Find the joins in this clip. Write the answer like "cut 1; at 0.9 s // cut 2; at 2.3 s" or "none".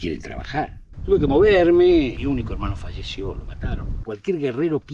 cut 1; at 0.9 s // cut 2; at 4.1 s